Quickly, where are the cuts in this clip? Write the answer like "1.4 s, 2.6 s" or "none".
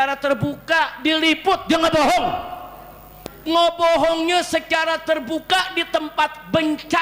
3.1 s